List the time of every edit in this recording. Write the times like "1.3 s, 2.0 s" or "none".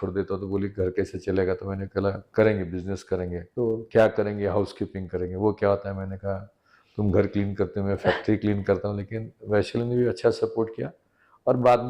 2.2 s, 3.4 s